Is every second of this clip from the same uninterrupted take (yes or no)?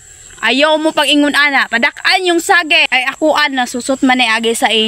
no